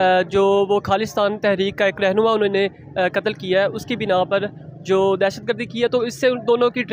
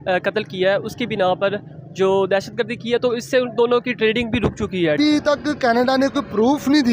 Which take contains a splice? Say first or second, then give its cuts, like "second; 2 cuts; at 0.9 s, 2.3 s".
second; 1 cut; at 5.0 s